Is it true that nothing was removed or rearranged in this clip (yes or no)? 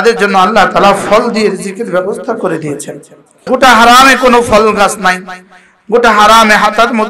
no